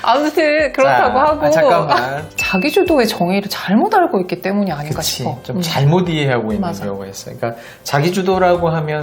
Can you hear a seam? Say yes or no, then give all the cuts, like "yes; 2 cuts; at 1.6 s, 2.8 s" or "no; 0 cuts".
yes; 1 cut; at 2.4 s